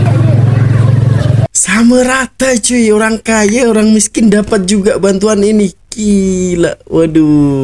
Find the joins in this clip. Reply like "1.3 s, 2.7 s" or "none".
none